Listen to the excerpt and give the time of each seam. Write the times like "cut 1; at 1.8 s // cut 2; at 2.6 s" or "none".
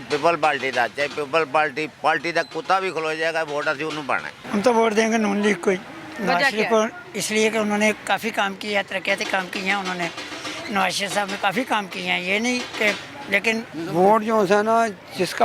none

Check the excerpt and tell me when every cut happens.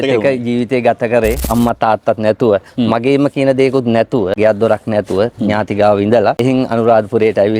cut 1; at 1.4 s

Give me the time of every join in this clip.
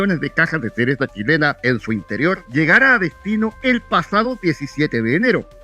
cut 1; at 2.4 s

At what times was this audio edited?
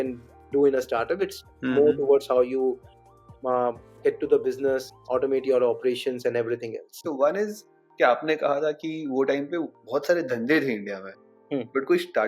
cut 1; at 6.9 s

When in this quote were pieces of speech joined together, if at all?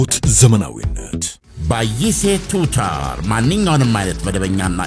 cut 1; at 1.3 s

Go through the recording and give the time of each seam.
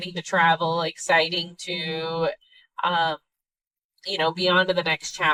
none

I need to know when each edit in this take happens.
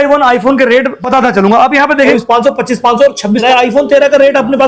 cut 1; at 1.0 s // cut 2; at 2.1 s // cut 3; at 3.4 s

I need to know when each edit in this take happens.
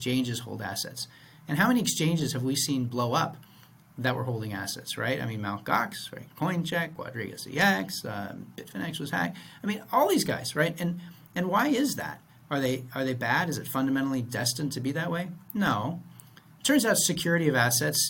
none

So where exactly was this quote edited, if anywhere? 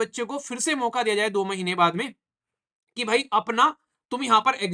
none

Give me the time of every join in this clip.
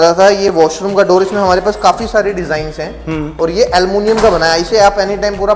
none

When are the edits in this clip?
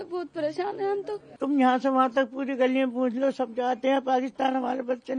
cut 1; at 1.2 s

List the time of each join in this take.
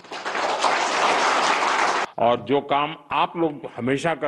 cut 1; at 2.0 s

